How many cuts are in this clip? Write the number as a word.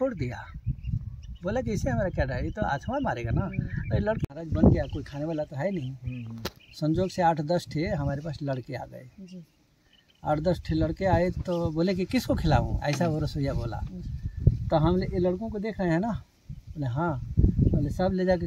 one